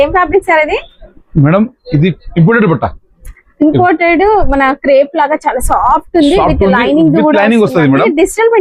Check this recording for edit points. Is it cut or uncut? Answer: uncut